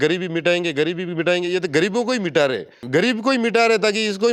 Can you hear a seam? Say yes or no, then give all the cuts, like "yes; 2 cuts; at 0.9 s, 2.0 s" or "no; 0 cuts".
yes; 1 cut; at 2.8 s